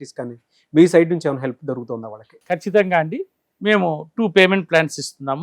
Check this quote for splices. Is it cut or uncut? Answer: uncut